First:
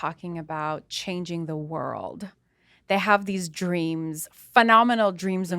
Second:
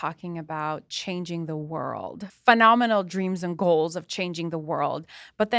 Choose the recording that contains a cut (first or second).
second